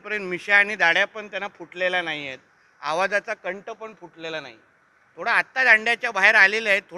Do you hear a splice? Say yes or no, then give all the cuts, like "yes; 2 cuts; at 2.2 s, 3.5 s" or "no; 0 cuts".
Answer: no; 0 cuts